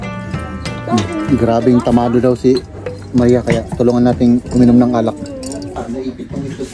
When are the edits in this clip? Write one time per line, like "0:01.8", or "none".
0:05.8